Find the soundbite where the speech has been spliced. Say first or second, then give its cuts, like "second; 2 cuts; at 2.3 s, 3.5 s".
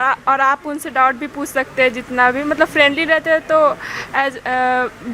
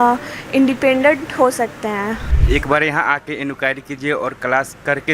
second; 1 cut; at 2.3 s